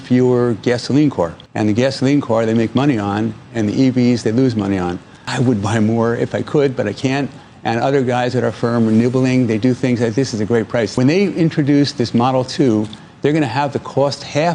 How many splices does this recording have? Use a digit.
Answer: 3